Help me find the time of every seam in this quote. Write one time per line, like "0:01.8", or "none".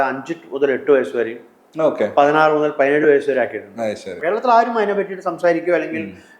0:04.2